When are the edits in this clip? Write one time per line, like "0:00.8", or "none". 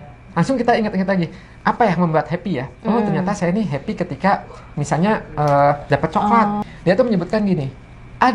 0:06.6